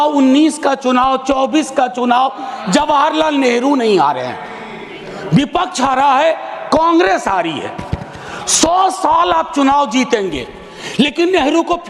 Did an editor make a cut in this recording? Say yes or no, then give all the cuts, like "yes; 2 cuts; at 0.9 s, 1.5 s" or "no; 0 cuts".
no; 0 cuts